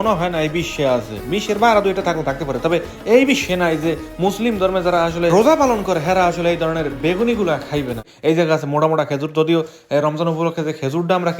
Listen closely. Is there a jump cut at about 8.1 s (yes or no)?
yes